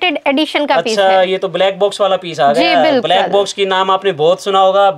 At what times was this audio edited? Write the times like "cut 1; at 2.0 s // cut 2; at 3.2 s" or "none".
none